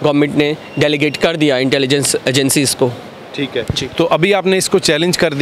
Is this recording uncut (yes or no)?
yes